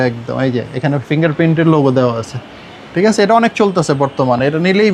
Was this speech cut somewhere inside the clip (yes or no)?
no